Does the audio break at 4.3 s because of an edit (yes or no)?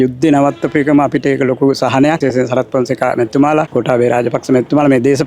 no